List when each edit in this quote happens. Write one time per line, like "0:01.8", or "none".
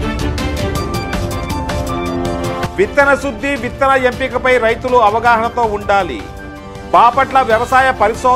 0:02.7